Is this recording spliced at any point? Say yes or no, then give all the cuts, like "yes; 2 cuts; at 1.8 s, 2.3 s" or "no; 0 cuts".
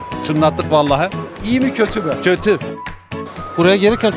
yes; 1 cut; at 3.0 s